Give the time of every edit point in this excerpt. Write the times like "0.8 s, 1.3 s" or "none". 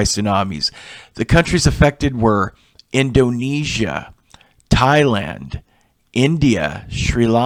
none